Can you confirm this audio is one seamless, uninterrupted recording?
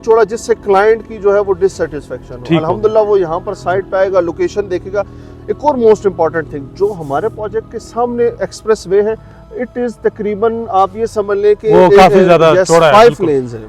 yes; 0 cuts

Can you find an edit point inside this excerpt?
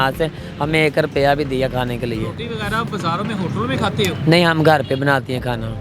no; 0 cuts

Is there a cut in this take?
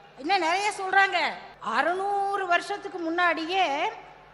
yes; 1 cut; at 1.5 s

